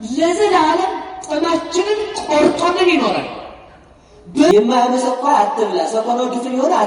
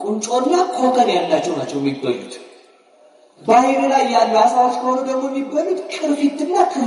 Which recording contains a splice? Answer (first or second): first